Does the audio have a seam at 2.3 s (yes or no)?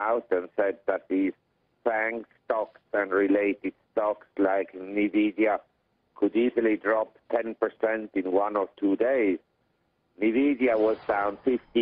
no